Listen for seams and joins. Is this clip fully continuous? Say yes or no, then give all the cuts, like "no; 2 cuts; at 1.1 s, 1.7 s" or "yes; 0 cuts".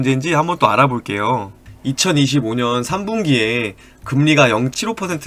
yes; 0 cuts